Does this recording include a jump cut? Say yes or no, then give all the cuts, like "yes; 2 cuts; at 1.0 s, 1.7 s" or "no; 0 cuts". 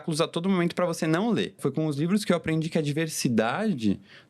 yes; 1 cut; at 1.6 s